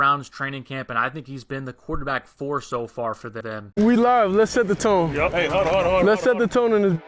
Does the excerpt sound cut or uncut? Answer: cut